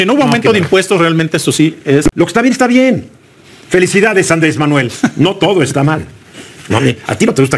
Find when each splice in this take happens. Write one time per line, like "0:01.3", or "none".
0:02.1